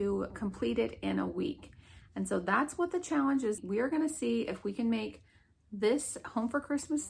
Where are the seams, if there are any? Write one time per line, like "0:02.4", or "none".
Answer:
0:03.6